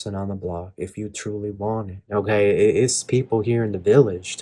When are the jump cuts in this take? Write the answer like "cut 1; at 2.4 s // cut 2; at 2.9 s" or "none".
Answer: cut 1; at 2.0 s